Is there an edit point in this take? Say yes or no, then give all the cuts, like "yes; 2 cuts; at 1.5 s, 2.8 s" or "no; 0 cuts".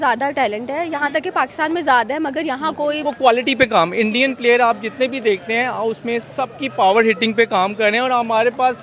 yes; 1 cut; at 3.0 s